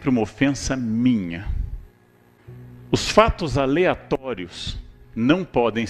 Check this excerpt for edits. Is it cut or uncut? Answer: cut